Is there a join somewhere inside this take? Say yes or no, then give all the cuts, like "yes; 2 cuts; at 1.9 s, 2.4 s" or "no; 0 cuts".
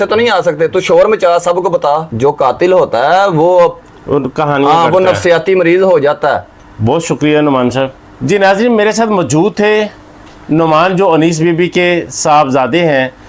no; 0 cuts